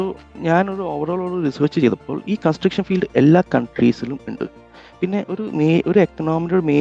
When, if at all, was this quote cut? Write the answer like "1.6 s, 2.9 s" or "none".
none